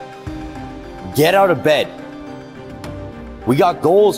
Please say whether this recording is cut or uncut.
uncut